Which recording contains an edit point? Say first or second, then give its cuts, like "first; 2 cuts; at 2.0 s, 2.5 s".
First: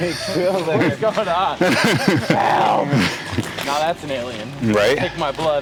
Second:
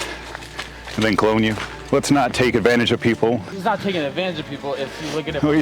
second; 2 cuts; at 1.8 s, 3.5 s